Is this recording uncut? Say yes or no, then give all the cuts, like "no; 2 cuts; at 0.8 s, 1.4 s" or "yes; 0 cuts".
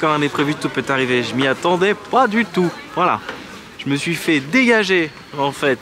yes; 0 cuts